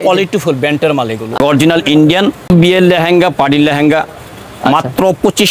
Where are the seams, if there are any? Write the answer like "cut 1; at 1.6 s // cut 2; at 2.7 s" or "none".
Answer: cut 1; at 1.4 s // cut 2; at 2.5 s